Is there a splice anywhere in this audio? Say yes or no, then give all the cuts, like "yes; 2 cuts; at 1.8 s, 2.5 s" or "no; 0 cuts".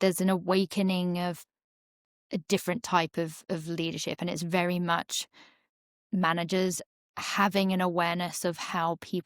no; 0 cuts